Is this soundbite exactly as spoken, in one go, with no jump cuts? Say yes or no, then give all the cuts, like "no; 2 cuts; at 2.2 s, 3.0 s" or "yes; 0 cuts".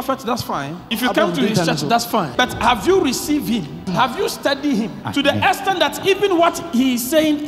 no; 4 cuts; at 0.9 s, 2.3 s, 3.8 s, 5.0 s